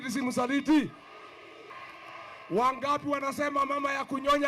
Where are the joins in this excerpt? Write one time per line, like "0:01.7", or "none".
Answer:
0:01.7